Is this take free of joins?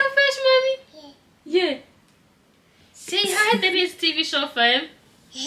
yes; 0 cuts

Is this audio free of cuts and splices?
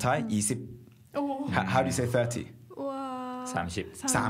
yes; 0 cuts

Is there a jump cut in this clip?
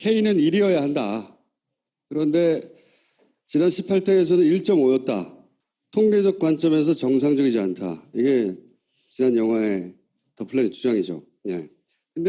yes; 1 cut; at 4.3 s

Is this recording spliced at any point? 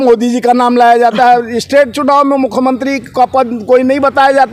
no; 0 cuts

